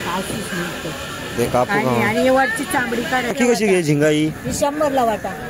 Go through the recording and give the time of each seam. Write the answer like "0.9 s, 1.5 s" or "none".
3.3 s

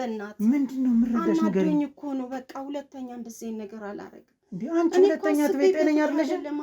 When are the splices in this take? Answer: none

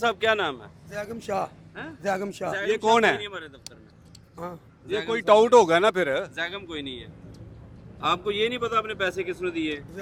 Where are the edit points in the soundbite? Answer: none

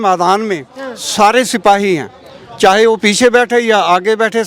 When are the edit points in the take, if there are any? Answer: none

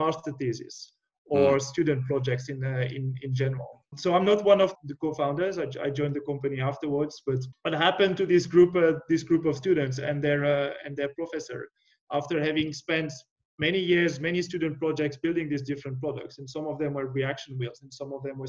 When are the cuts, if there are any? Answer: 3.9 s, 4.8 s, 7.5 s

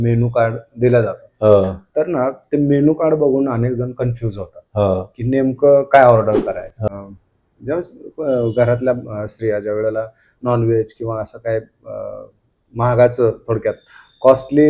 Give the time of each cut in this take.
6.8 s

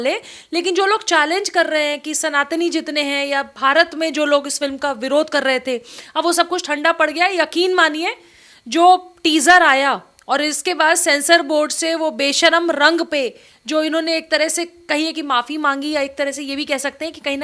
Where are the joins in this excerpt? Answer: none

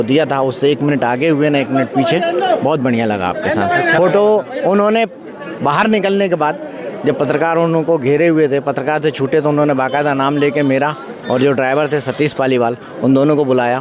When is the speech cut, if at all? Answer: none

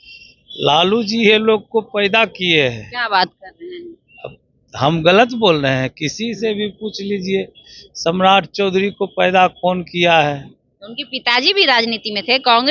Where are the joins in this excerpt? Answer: none

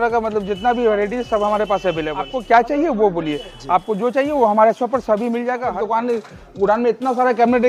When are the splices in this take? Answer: 2.4 s, 5.8 s

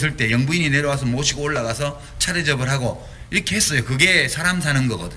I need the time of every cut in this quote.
3.0 s

